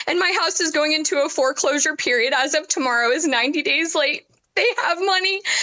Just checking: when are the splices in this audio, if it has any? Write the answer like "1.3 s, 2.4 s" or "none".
none